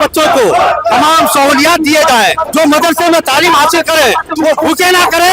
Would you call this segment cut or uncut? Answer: cut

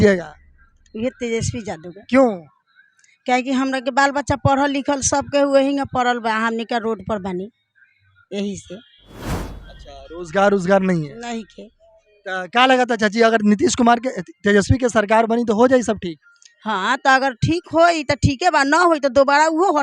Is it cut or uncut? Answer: uncut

